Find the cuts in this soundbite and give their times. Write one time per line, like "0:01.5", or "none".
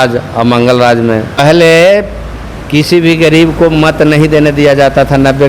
0:01.4